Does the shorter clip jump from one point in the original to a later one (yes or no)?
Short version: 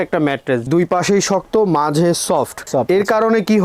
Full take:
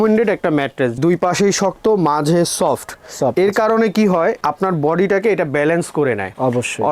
yes